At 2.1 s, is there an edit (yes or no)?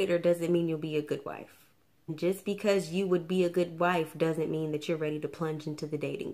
yes